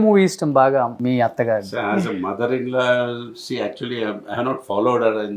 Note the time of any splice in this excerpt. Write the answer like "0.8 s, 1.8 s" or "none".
1.0 s

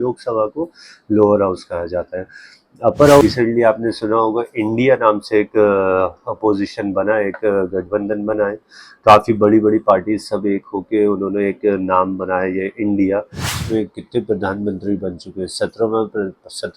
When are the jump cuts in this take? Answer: 3.2 s, 13.6 s

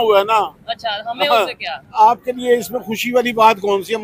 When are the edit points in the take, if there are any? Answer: 1.9 s

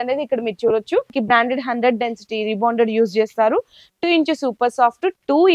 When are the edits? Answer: 1.1 s

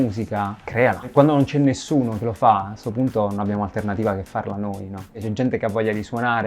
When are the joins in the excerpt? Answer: 1.1 s, 5.2 s

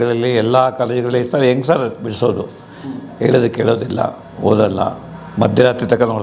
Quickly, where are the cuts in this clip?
none

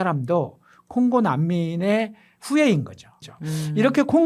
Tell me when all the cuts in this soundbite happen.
3.3 s

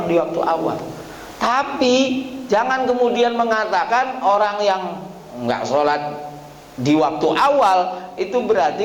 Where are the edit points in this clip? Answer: none

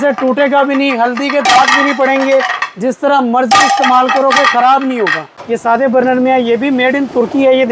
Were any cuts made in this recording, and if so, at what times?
5.3 s

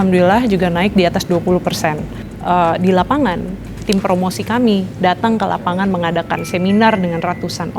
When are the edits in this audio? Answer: 2.3 s

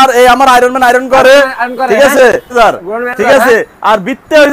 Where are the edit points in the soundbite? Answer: 2.5 s

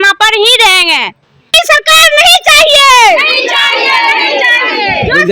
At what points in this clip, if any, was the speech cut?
1.5 s

